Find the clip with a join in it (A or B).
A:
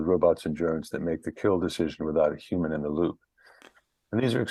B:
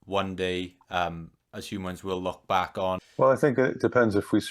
B